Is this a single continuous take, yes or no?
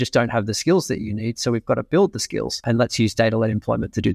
no